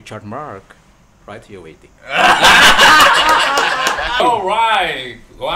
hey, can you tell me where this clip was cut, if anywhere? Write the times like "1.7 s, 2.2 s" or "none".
4.2 s